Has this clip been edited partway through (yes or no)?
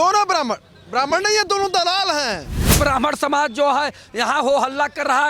yes